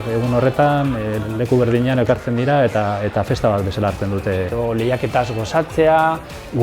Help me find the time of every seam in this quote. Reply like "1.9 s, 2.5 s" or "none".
4.5 s